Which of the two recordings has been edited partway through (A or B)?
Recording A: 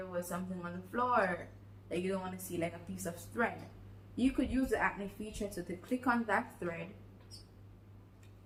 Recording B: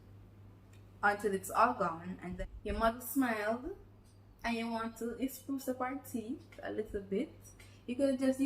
B